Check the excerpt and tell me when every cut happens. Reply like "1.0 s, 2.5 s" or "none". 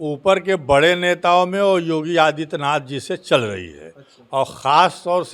none